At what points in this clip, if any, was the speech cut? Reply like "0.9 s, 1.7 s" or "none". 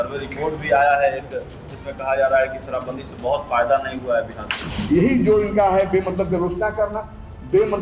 4.8 s